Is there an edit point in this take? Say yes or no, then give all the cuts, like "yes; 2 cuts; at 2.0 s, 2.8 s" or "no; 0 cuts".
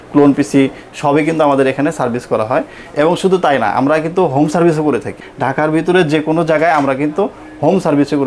yes; 1 cut; at 5.2 s